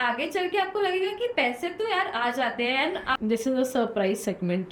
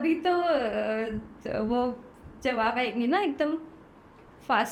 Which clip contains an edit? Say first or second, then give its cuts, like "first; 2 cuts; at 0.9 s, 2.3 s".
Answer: first; 1 cut; at 3.2 s